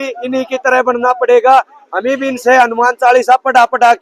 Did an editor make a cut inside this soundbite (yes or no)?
no